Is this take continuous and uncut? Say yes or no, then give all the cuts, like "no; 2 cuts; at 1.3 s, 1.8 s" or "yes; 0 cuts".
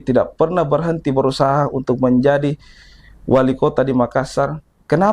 yes; 0 cuts